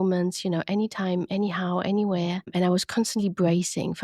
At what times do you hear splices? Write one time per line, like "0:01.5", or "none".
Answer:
0:02.5